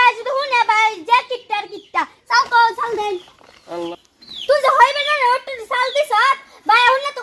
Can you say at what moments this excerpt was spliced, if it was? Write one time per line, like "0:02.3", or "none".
0:03.9